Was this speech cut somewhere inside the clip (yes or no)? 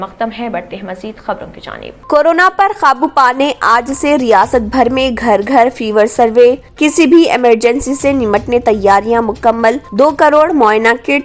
yes